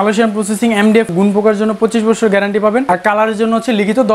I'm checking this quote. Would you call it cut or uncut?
cut